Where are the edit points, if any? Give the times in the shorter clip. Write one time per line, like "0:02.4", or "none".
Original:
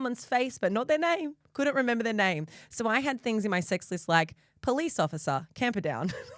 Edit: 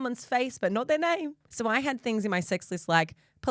0:01.4